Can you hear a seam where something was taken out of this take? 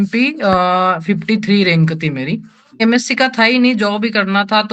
yes; 1 cut; at 2.8 s

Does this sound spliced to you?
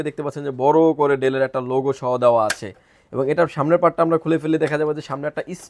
no; 0 cuts

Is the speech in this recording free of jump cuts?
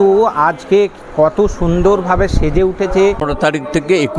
no; 1 cut; at 3.3 s

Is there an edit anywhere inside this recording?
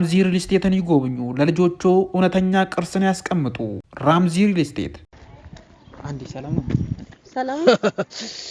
yes; 1 cut; at 5.2 s

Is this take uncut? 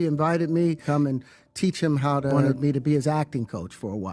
no; 2 cuts; at 0.8 s, 2.3 s

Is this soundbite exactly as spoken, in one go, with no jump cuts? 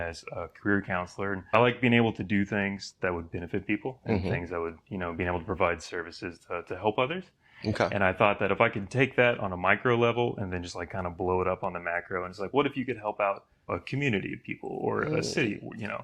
yes; 0 cuts

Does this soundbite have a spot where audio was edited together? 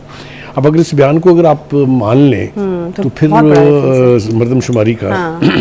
no; 0 cuts

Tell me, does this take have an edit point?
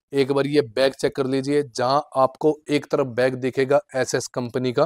no; 0 cuts

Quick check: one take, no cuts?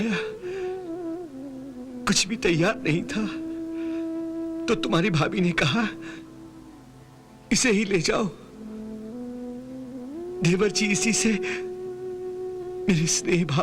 yes; 0 cuts

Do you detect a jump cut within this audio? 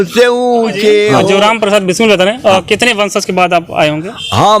yes; 1 cut; at 1.1 s

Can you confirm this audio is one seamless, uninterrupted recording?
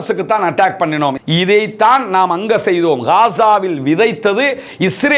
no; 1 cut; at 1.1 s

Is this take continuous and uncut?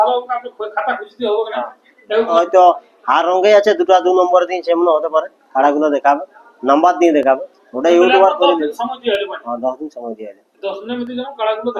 no; 1 cut; at 2.3 s

